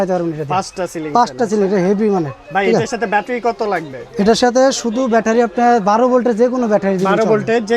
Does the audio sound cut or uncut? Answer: uncut